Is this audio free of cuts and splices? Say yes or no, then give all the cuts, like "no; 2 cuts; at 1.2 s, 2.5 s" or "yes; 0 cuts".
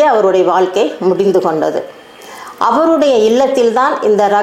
yes; 0 cuts